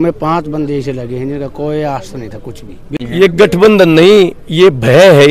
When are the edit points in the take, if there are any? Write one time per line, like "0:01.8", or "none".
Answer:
0:03.3